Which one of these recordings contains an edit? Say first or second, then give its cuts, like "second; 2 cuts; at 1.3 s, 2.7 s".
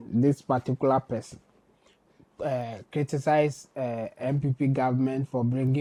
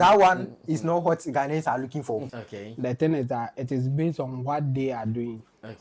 second; 1 cut; at 2.3 s